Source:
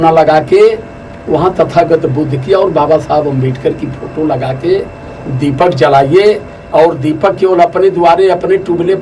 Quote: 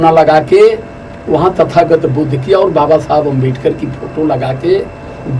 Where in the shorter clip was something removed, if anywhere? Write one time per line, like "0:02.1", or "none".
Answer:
none

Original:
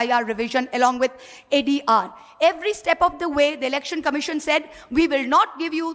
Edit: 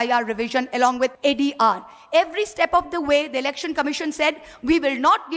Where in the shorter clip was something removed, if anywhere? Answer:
0:01.1

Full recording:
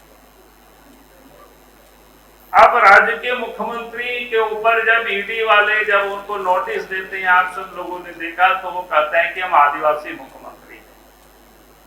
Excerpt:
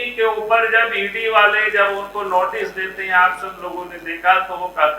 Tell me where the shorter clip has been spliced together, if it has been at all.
none

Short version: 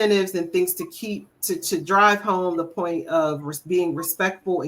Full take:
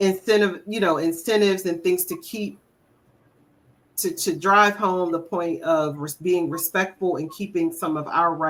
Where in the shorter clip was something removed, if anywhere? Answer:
0:01.3

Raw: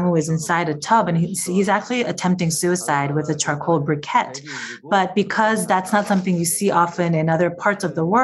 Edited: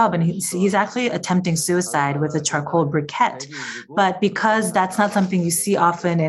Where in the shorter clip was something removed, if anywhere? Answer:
none

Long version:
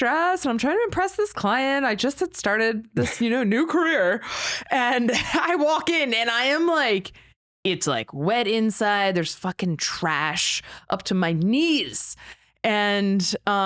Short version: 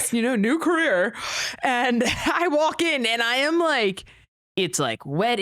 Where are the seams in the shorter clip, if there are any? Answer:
none

